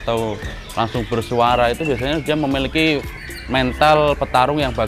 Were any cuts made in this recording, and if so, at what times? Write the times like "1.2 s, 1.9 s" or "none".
none